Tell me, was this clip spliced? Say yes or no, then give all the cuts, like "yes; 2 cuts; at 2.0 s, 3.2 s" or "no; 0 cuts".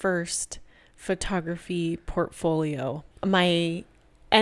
yes; 1 cut; at 3.1 s